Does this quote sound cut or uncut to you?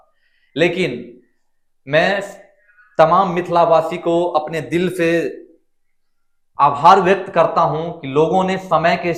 uncut